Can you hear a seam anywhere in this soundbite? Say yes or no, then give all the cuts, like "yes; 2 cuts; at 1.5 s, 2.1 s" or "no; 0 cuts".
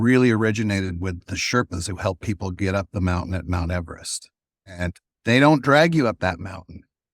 yes; 1 cut; at 4.6 s